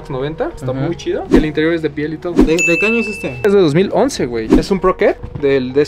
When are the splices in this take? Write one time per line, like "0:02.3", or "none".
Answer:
0:01.2
0:04.4